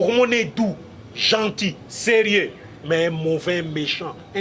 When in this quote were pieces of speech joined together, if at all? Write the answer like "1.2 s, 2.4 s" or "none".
none